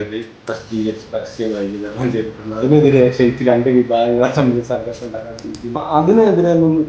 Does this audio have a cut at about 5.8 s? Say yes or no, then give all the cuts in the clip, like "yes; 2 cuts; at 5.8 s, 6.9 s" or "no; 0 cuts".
yes; 1 cut; at 5.8 s